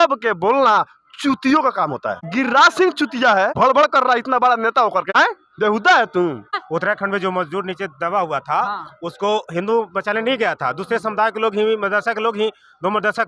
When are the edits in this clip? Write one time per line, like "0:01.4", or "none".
0:05.1
0:06.6